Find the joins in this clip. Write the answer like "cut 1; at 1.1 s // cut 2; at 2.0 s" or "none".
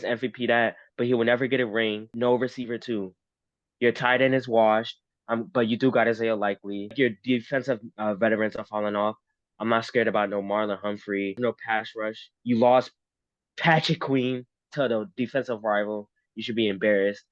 cut 1; at 2.1 s // cut 2; at 6.9 s // cut 3; at 11.7 s